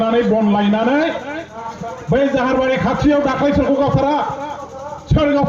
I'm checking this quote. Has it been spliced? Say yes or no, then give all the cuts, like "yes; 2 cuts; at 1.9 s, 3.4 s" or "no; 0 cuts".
yes; 1 cut; at 1.7 s